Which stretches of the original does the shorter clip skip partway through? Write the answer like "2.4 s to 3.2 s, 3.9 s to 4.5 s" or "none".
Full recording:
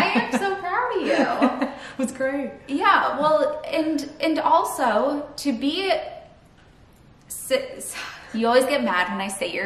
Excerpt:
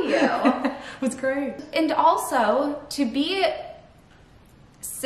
2.6 s to 4.1 s